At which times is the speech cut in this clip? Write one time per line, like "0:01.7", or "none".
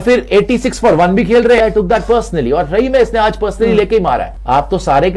0:01.6
0:04.3